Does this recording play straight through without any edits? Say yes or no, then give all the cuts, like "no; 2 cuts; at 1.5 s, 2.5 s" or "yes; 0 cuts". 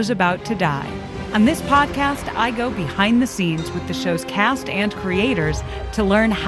no; 1 cut; at 1.2 s